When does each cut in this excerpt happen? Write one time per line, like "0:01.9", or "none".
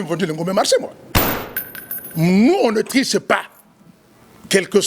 0:01.5

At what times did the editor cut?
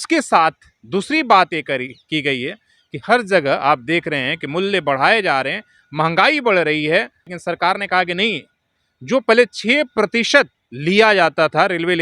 0:07.3
0:10.6

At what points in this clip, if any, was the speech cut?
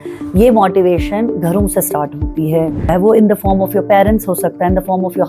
0:02.9

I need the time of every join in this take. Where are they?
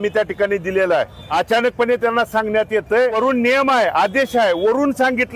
0:01.2
0:03.1

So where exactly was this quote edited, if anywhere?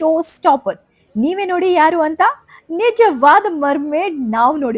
none

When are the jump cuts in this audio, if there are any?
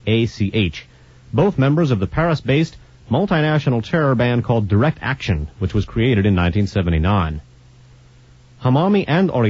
0:07.6

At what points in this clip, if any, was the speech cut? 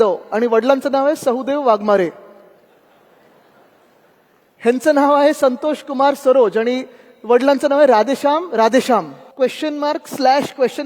0:09.2

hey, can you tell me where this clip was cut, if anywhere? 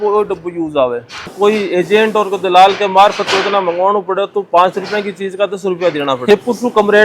0:01.3
0:06.3

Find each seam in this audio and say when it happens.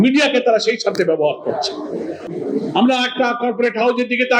0:02.2

